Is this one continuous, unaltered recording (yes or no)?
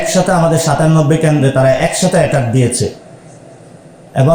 yes